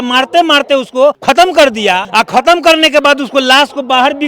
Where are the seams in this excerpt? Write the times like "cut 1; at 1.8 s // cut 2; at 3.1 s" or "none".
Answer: cut 1; at 1.2 s // cut 2; at 2.0 s